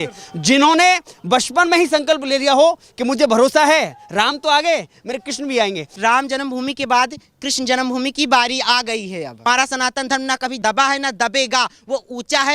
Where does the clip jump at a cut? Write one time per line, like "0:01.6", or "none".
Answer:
0:05.9
0:09.4